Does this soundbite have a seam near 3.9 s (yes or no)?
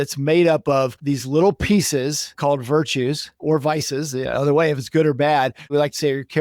no